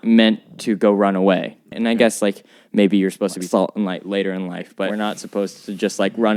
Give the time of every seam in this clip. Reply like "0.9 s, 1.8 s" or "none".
1.7 s, 3.4 s, 4.9 s